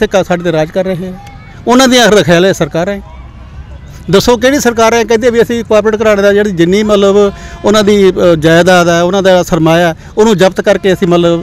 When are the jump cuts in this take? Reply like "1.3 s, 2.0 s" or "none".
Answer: none